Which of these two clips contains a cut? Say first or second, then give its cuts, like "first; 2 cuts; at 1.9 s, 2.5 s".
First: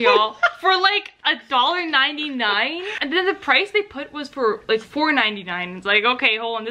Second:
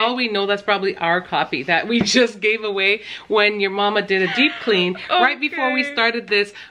first; 1 cut; at 2.9 s